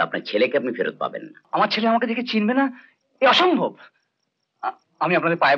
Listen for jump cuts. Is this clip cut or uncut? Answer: cut